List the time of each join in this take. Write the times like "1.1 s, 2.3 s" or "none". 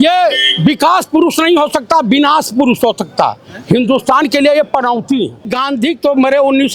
5.5 s